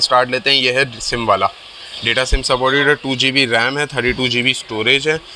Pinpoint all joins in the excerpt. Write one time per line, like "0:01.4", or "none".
none